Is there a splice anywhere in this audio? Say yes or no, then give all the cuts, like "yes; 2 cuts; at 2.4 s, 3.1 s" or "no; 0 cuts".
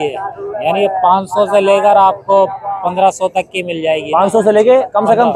no; 0 cuts